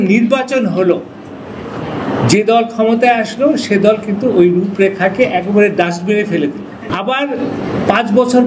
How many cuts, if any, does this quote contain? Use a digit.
1